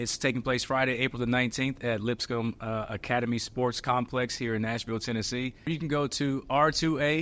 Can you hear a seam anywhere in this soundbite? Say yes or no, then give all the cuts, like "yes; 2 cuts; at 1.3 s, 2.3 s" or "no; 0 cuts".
yes; 1 cut; at 5.7 s